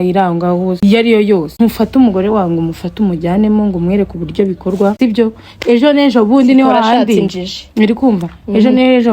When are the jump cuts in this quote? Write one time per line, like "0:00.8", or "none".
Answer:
0:00.8
0:01.5
0:04.9